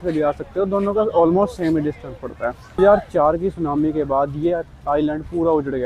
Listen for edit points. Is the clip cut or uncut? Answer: cut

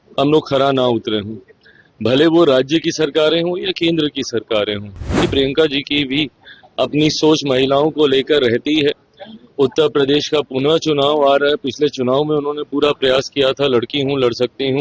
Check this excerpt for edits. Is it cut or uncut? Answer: cut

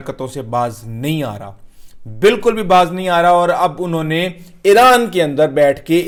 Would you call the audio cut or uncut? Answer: uncut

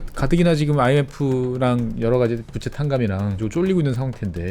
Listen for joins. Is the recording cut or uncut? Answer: cut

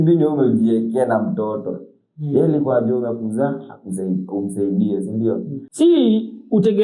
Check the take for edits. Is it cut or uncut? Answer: cut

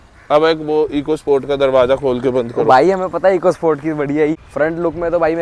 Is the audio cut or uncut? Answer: cut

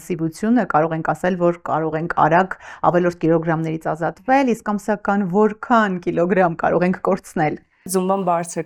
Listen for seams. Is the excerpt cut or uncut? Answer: uncut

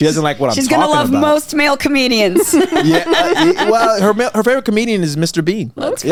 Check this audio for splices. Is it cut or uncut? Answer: uncut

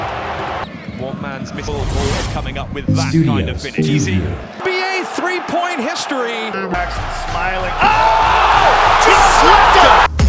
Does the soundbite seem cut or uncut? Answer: uncut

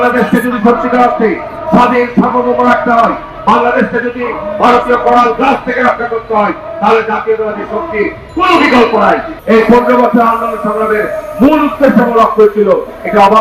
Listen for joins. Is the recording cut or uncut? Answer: cut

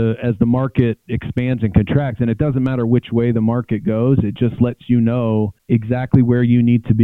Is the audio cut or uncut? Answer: uncut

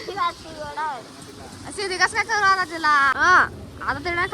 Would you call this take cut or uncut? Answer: cut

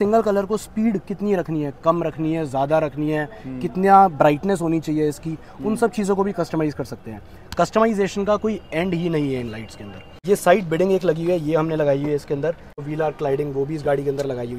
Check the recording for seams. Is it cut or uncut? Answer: cut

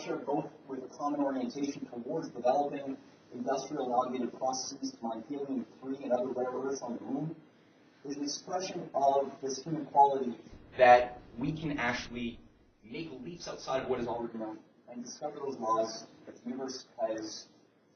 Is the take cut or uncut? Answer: cut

